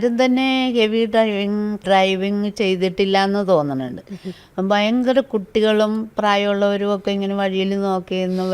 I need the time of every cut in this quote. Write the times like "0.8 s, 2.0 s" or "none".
1.8 s